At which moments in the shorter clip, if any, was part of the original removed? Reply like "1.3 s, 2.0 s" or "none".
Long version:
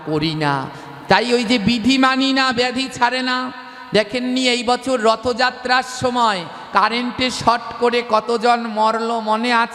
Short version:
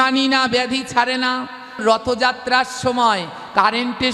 1.8 s